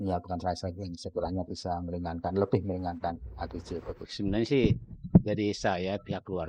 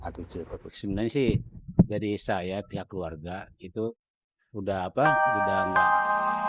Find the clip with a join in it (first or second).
second